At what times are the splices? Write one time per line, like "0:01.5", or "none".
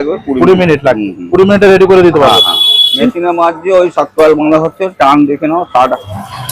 0:02.9